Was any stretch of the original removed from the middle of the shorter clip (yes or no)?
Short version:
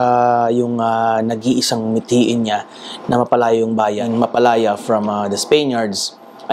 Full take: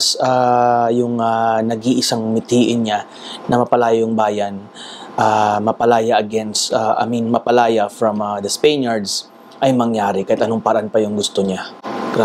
yes